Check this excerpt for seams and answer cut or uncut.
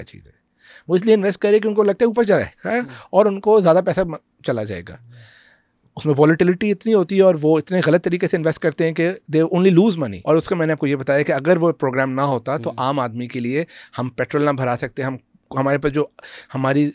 cut